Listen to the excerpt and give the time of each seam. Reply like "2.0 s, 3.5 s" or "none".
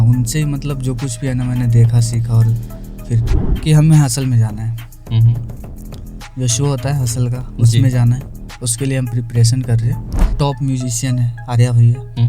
3.3 s, 10.3 s